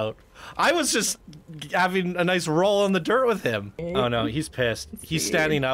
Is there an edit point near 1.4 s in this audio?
no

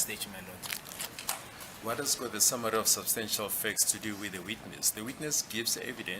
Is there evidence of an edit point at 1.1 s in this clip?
yes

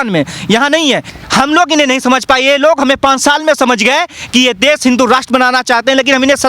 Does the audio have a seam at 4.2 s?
no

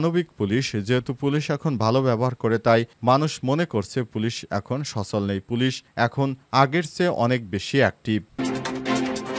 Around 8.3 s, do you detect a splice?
yes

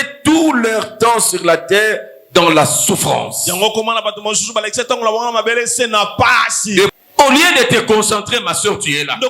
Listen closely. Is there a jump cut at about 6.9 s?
yes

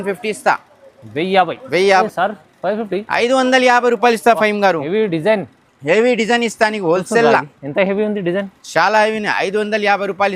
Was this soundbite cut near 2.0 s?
yes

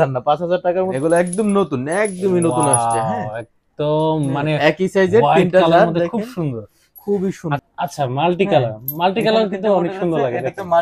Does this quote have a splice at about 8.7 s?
no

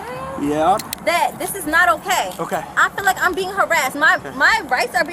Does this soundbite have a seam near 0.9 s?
yes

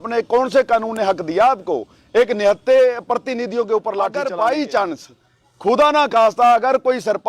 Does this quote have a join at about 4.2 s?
yes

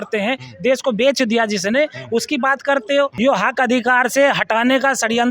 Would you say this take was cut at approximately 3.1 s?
yes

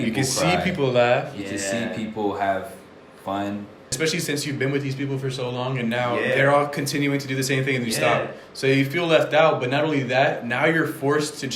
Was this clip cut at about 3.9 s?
yes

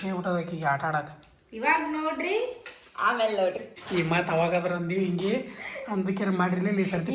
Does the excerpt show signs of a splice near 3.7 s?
yes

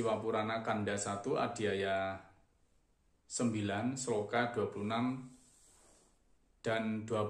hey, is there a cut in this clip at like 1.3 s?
no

